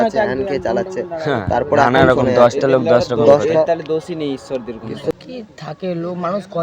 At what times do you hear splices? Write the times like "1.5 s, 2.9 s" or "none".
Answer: 5.1 s